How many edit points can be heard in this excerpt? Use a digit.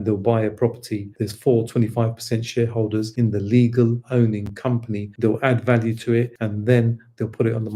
3